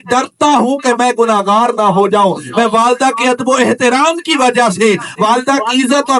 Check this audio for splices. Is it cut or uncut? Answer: uncut